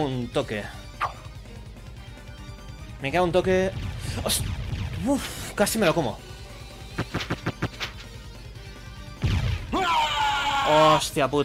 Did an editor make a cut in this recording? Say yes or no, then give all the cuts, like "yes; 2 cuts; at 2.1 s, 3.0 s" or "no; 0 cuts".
no; 0 cuts